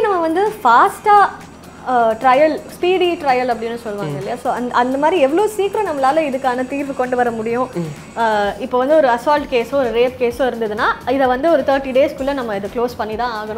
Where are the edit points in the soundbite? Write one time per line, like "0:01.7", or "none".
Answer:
none